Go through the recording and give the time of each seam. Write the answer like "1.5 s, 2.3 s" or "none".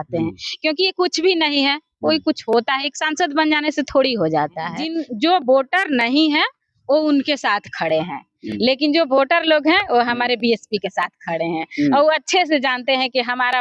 4.9 s